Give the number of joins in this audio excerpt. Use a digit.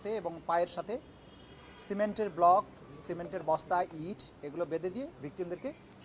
0